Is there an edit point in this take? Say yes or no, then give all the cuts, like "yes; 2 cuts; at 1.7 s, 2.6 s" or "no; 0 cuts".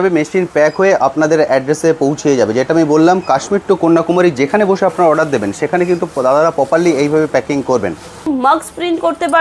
yes; 1 cut; at 8.2 s